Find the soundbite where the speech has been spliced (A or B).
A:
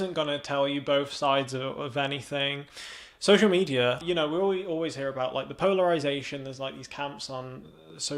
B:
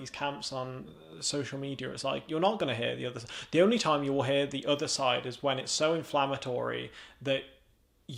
A